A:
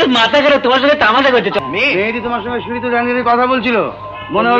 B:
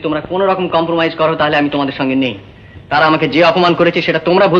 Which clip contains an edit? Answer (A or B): A